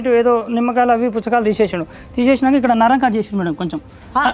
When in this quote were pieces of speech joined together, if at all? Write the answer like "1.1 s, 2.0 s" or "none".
none